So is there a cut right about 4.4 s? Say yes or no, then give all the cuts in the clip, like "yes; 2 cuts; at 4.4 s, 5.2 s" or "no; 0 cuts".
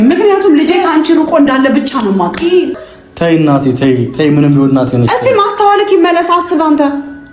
no; 1 cut; at 2.8 s